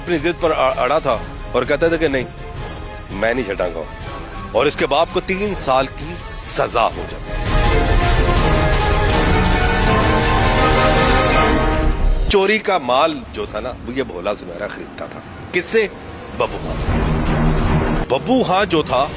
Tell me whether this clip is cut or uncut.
cut